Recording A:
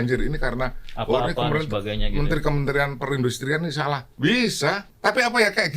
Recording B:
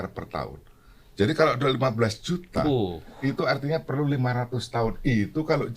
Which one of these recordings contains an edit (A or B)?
A